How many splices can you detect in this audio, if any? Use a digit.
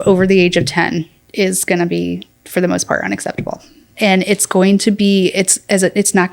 1